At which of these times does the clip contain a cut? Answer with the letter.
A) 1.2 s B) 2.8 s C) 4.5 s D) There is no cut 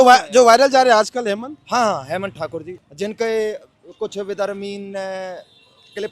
B